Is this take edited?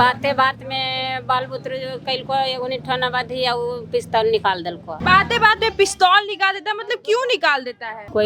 no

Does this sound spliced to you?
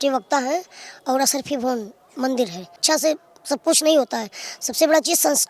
yes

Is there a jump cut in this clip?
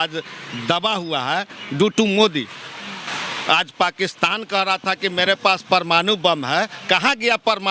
no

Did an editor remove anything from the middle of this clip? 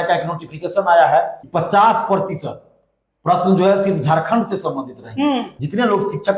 yes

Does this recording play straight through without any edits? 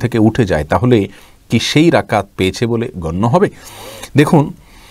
yes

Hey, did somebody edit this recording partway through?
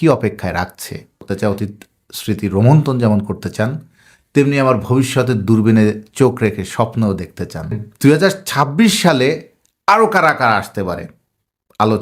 yes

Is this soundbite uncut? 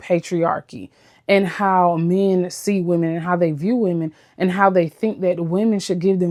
yes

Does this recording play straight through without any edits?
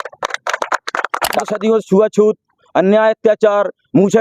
no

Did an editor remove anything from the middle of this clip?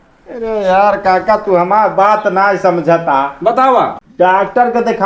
yes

